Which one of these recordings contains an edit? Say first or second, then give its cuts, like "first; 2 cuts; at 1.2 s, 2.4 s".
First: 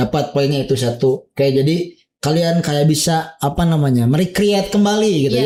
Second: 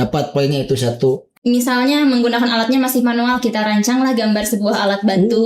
second; 1 cut; at 1.3 s